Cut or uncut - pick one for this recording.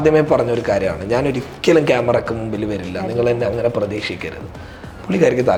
uncut